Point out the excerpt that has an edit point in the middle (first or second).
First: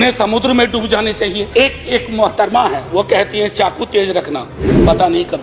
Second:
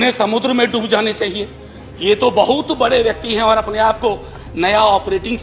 first